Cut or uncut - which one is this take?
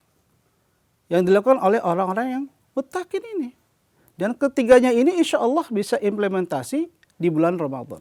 uncut